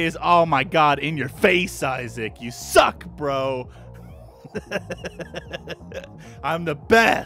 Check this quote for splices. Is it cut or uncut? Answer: uncut